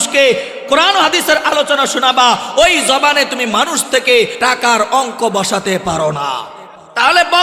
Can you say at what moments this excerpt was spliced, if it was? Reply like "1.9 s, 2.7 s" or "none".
4.3 s